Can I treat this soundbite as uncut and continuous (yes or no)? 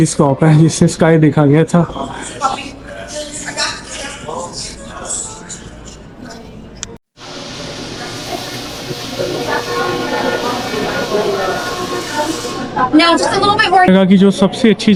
yes